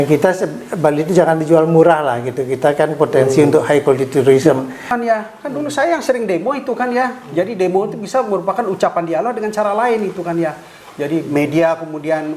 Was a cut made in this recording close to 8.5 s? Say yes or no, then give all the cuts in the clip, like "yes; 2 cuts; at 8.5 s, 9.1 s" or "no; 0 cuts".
no; 1 cut; at 4.9 s